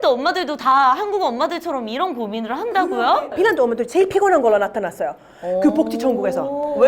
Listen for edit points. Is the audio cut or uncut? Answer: cut